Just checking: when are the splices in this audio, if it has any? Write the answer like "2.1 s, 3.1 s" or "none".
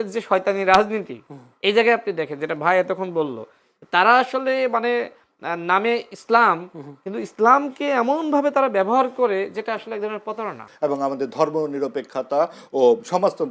10.6 s